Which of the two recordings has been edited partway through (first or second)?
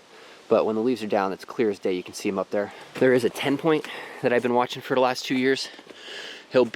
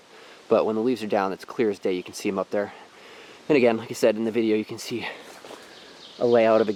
first